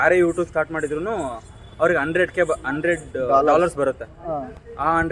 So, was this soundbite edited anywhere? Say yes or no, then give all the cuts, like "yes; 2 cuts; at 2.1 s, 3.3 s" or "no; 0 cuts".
no; 0 cuts